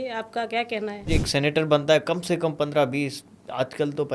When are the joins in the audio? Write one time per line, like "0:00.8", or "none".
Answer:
0:01.1